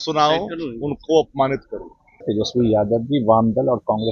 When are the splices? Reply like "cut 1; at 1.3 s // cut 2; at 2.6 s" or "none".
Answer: cut 1; at 2.2 s